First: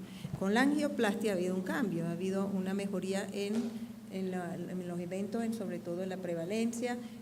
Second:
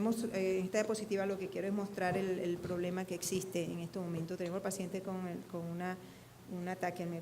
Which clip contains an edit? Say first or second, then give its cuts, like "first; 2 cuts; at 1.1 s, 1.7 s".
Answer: second; 1 cut; at 5.9 s